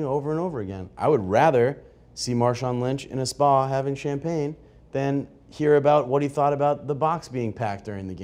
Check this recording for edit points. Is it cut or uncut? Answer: uncut